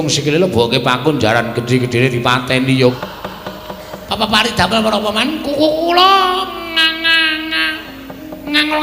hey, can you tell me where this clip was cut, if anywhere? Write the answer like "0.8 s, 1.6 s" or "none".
2.9 s